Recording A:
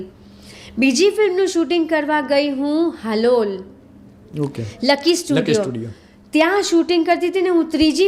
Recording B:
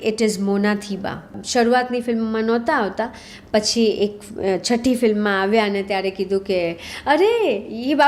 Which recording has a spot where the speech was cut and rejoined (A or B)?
B